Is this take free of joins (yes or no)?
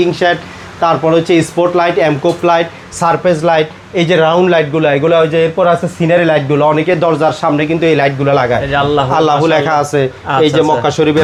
yes